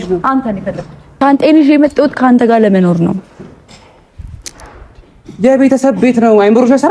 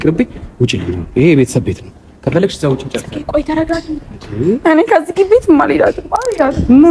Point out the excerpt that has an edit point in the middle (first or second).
first